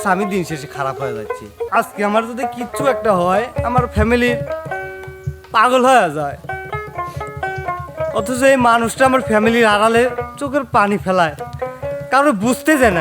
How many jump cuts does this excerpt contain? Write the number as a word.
one